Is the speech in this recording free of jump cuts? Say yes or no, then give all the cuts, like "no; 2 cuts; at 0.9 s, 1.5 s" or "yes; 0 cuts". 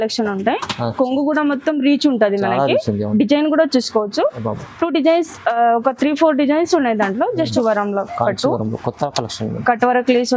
no; 1 cut; at 7.4 s